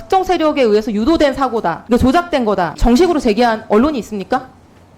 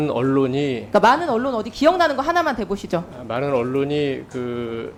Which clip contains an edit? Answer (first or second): first